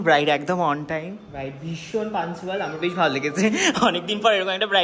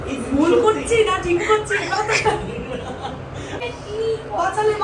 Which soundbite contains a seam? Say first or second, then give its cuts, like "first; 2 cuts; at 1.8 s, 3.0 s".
second; 1 cut; at 3.6 s